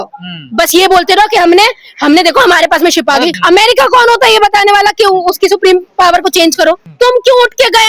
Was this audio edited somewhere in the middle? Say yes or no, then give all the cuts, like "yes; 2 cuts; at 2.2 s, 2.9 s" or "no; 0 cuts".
yes; 2 cuts; at 3.4 s, 6.9 s